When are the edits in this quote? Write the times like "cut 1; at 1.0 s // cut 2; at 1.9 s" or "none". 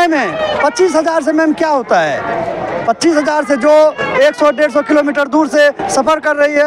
none